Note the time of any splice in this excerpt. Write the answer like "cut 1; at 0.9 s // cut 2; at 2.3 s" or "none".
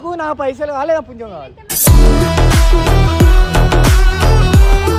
none